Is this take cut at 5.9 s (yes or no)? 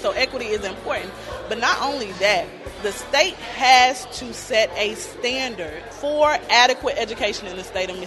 yes